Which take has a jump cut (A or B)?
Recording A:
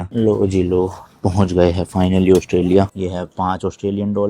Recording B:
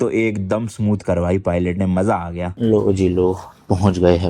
A